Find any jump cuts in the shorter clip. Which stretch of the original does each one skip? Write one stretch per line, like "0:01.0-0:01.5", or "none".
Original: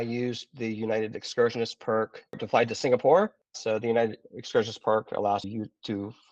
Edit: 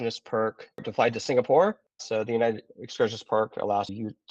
none